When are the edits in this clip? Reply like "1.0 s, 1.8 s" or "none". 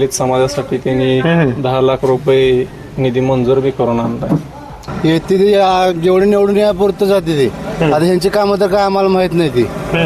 4.9 s